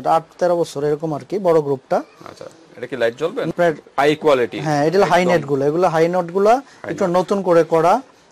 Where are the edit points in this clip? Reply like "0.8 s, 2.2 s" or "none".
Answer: 3.5 s